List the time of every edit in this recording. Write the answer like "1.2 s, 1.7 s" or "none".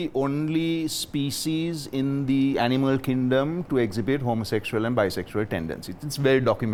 none